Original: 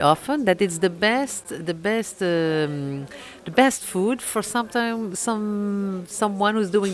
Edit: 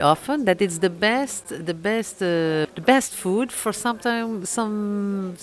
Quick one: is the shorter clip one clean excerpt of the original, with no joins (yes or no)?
no